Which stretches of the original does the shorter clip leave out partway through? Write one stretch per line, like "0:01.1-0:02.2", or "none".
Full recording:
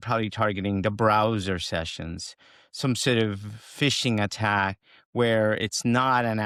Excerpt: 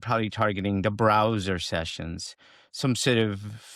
none